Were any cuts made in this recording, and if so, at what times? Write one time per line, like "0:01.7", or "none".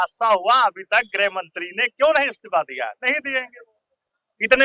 none